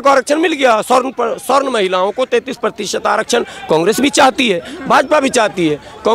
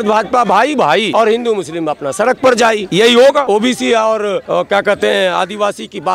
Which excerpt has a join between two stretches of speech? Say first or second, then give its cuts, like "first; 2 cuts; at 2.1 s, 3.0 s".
second; 4 cuts; at 1.1 s, 2.9 s, 3.5 s, 4.4 s